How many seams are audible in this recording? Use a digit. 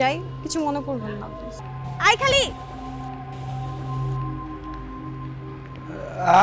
1